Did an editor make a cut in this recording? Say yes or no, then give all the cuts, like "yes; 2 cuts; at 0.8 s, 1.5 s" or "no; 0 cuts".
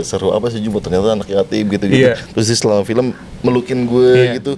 no; 0 cuts